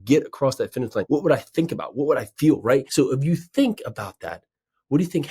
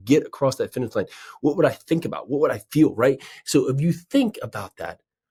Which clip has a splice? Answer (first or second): first